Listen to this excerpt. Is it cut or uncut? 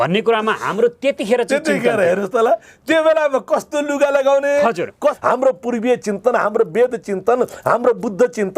cut